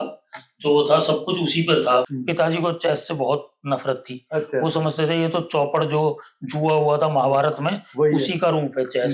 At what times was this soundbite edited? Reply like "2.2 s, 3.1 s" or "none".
2.1 s